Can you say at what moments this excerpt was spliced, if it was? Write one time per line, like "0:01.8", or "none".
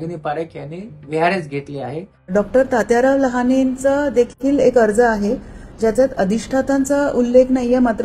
0:02.3